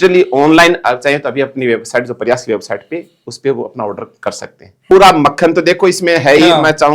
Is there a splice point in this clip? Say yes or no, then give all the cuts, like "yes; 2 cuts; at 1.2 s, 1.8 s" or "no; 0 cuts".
yes; 1 cut; at 4.8 s